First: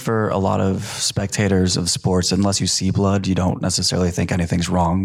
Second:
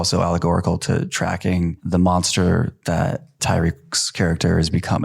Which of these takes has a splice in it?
second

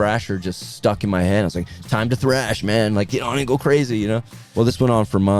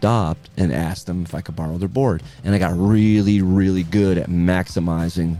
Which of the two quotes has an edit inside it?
first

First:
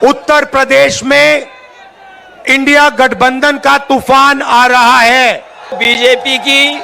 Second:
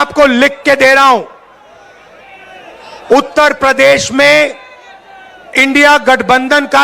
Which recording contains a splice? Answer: first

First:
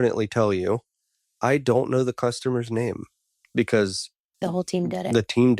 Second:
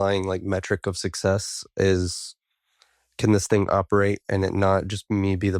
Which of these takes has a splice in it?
first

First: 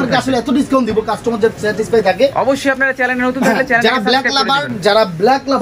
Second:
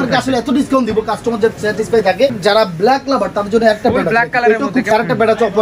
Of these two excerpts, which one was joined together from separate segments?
second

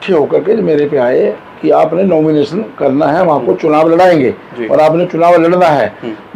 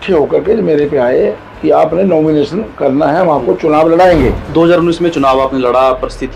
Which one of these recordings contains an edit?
second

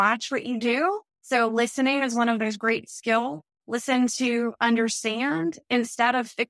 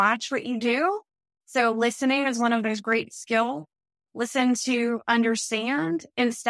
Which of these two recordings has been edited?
first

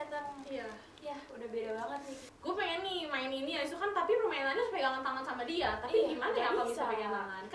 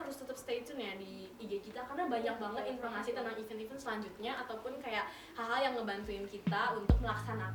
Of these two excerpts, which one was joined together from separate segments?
first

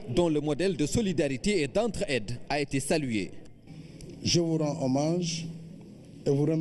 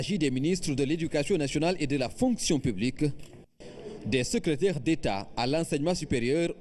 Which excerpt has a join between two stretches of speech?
second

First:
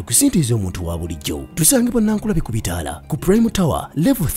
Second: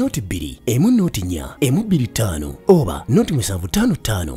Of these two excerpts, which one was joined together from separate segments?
first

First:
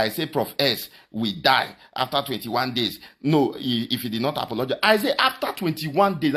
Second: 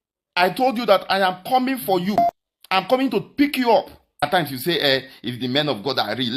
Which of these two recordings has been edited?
second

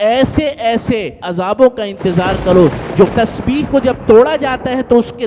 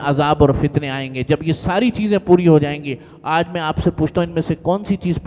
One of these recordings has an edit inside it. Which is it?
first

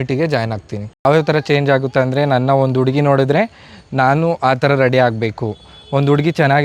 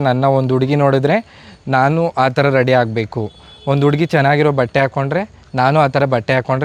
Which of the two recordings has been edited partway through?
first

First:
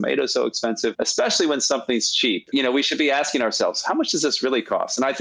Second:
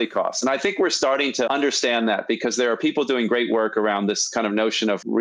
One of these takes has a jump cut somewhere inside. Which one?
first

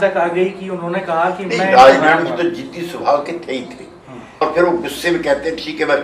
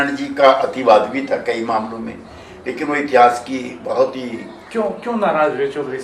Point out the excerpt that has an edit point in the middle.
first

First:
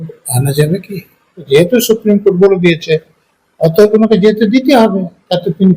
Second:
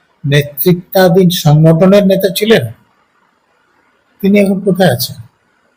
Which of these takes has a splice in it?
first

